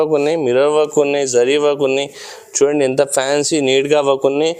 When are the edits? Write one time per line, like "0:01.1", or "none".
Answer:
none